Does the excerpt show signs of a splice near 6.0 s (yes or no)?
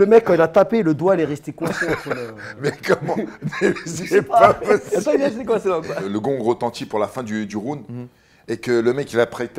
yes